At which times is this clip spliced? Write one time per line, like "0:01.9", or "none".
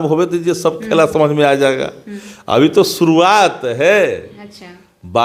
none